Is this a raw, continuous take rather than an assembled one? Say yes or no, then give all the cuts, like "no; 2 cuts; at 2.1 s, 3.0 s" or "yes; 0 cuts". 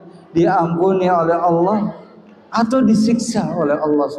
yes; 0 cuts